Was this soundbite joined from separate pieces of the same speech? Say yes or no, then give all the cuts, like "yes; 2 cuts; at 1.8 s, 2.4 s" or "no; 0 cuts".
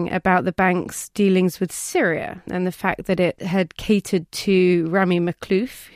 no; 0 cuts